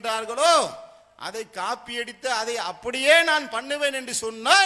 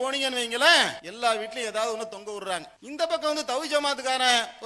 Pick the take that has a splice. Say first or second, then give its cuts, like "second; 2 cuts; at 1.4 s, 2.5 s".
second; 2 cuts; at 1.0 s, 2.8 s